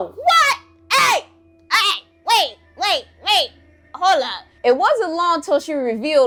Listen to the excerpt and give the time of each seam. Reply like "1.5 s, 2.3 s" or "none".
none